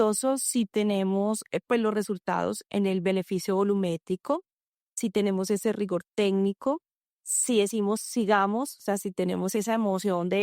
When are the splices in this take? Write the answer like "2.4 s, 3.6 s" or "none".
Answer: 2.6 s, 7.4 s, 9.6 s